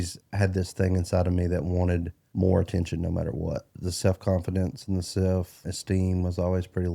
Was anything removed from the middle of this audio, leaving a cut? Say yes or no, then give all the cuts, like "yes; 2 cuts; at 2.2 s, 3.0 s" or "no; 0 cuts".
yes; 3 cuts; at 2.2 s, 3.7 s, 5.6 s